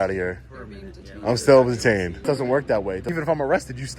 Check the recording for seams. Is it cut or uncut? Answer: cut